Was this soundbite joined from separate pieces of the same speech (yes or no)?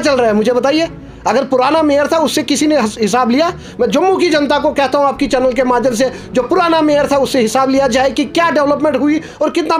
no